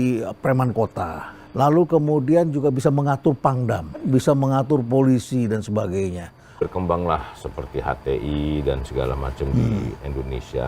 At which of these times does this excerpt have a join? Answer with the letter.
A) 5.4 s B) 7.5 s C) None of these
C